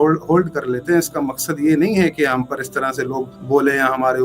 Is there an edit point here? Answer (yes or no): yes